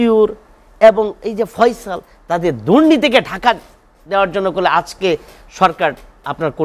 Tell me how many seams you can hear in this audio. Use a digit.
0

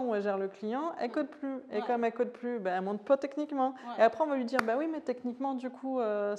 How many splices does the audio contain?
0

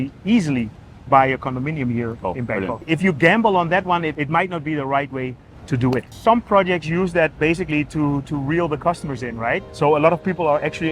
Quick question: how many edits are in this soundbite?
3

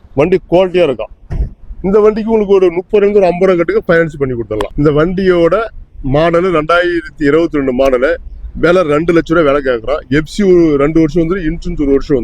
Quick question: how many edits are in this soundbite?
1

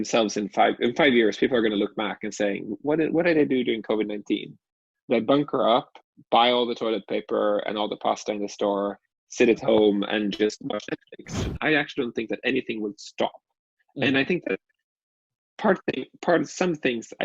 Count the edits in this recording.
1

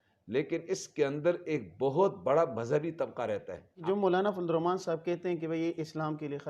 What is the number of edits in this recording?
1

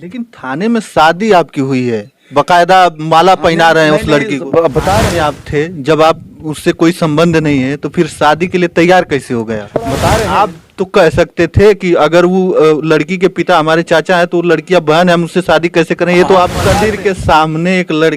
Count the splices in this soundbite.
3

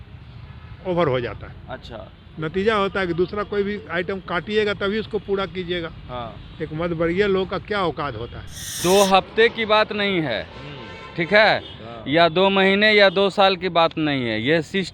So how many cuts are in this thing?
1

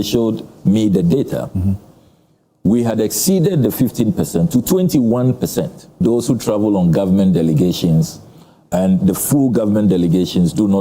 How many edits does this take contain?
1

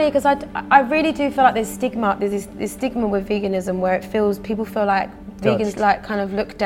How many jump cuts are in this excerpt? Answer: 0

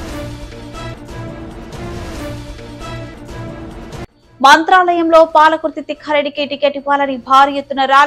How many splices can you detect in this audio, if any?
1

